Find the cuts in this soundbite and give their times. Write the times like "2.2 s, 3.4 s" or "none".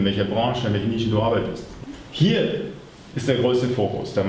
1.7 s